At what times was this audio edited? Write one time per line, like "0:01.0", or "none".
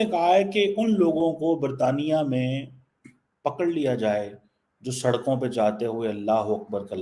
none